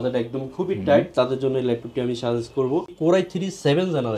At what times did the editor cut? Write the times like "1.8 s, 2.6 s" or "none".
2.9 s

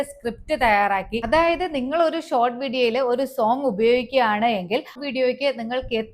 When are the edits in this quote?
1.2 s, 5.0 s

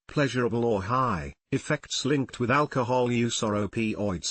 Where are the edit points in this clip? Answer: 2.2 s

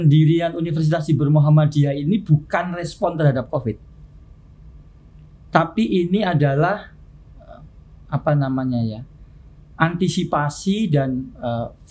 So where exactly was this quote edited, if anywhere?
none

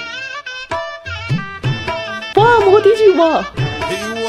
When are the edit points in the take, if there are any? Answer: 2.3 s

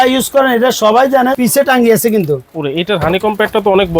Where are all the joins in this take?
1.4 s

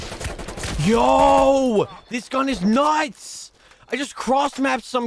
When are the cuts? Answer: none

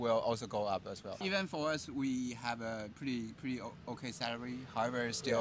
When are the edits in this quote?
1.2 s

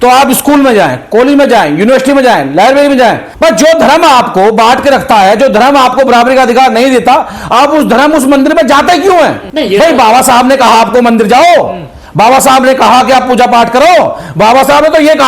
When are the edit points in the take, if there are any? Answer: 3.3 s, 9.5 s

